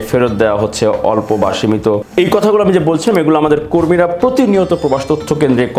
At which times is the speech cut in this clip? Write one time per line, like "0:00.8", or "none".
0:02.1